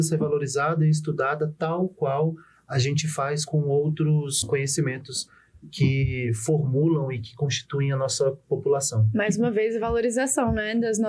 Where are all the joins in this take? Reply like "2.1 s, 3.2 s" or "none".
3.4 s, 4.4 s